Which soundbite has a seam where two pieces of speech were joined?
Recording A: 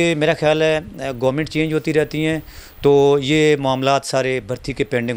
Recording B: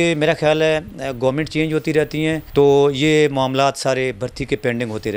B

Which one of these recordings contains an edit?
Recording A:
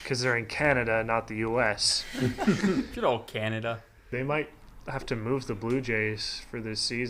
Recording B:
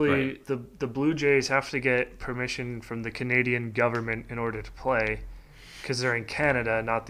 A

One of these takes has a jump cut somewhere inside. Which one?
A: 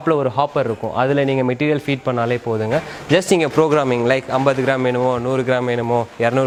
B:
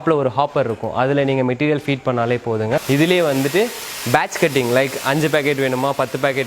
B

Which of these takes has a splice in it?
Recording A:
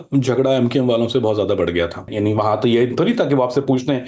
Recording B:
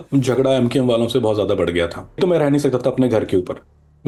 A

